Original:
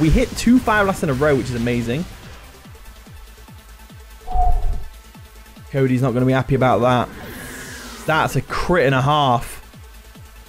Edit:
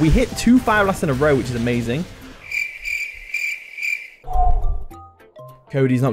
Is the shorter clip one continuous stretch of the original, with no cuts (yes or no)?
yes